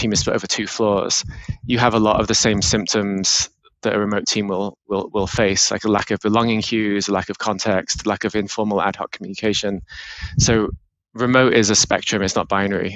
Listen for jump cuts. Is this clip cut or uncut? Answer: uncut